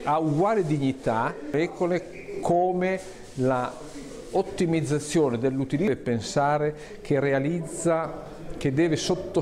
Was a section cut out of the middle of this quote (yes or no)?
yes